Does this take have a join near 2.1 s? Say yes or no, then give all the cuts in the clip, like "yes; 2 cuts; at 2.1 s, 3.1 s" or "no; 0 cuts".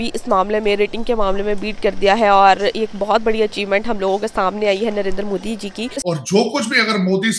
no; 1 cut; at 5.9 s